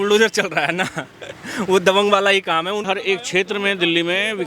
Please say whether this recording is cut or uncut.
cut